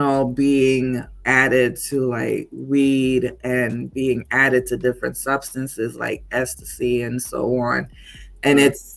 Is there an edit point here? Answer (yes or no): yes